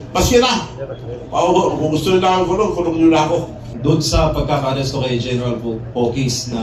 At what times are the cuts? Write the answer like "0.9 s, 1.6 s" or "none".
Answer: 3.6 s